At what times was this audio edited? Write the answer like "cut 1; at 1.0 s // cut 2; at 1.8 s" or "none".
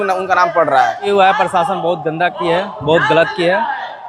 cut 1; at 1.1 s